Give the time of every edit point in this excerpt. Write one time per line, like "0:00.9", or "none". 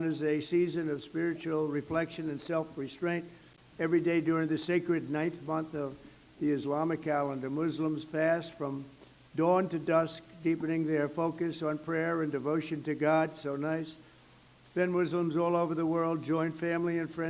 none